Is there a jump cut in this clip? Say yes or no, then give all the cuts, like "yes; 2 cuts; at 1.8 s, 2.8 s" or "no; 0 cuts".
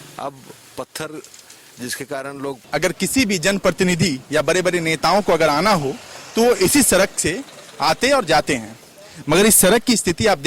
yes; 1 cut; at 2.6 s